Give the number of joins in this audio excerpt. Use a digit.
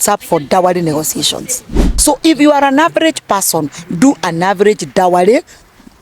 1